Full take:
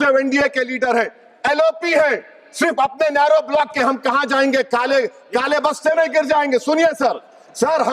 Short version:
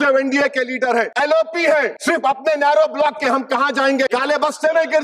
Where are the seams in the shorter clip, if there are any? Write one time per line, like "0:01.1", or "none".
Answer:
0:01.1
0:02.0
0:04.1